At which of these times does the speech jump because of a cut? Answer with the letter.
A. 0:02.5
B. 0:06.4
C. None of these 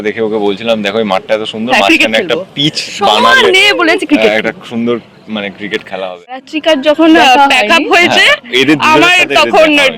B